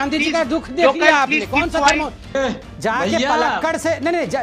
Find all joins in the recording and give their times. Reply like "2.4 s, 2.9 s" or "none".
2.3 s